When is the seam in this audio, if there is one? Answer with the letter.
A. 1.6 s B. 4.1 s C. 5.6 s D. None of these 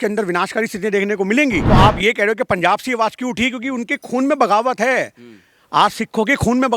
A